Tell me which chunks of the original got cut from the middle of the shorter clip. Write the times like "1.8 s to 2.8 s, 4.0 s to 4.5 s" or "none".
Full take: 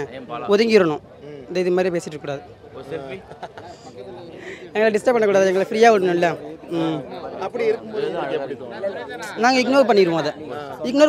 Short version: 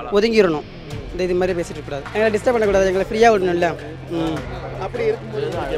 2.4 s to 4.7 s